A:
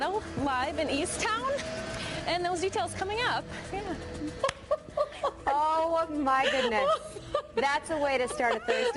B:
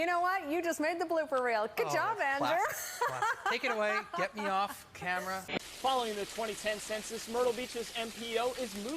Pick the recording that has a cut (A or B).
B